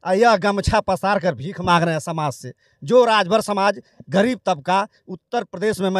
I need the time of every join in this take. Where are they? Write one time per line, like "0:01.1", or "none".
none